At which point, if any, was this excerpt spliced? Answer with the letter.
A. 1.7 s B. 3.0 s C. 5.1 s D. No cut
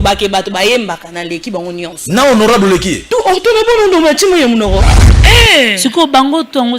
C